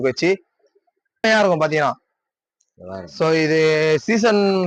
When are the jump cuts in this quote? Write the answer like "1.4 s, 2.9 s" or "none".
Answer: 1.2 s